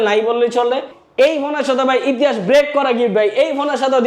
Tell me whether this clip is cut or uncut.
cut